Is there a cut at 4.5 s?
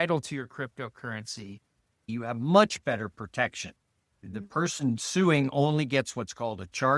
no; 1 cut; at 2.1 s

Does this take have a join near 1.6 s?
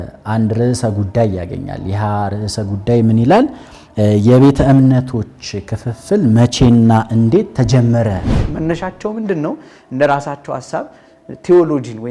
no; 1 cut; at 8.4 s

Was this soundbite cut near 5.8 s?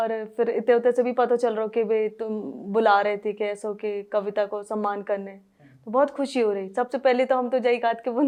no; 0 cuts

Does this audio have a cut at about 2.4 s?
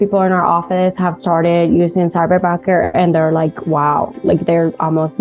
no; 0 cuts

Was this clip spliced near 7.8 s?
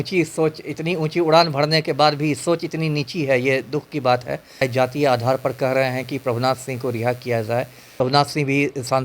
yes; 2 cuts; at 4.6 s, 7.8 s

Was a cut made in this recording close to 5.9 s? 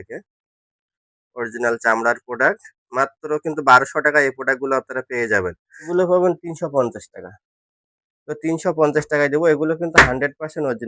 yes; 1 cut; at 5.9 s

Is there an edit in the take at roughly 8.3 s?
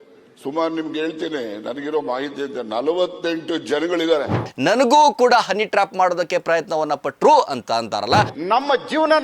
yes; 2 cuts; at 4.5 s, 8.3 s

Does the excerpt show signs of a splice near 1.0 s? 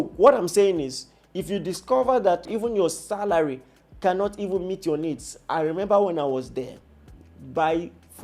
no; 1 cut; at 2.5 s

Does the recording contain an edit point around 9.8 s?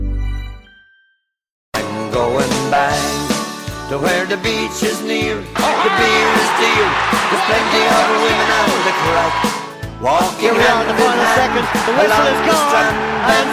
no; 1 cut; at 1.6 s

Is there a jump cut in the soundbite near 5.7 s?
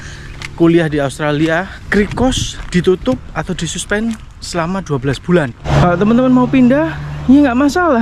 yes; 2 cuts; at 1.8 s, 5.7 s

